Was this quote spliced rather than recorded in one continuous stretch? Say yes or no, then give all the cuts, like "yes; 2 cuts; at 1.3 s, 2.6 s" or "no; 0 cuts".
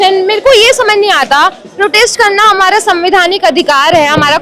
no; 0 cuts